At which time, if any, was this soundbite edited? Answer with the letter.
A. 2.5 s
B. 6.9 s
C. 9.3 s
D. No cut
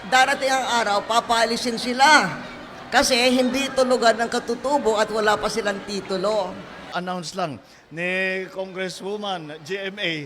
B